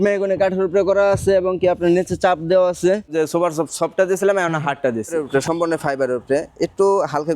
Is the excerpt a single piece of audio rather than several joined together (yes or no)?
no